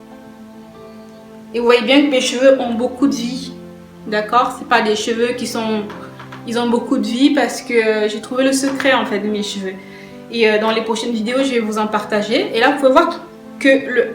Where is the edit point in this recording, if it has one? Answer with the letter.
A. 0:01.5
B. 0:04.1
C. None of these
A